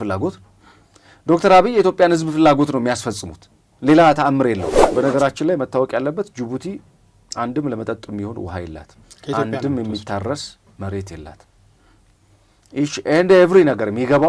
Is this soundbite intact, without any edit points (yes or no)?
no